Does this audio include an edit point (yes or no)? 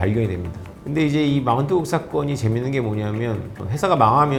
no